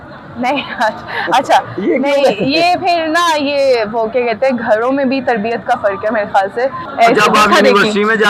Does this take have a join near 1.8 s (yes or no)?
no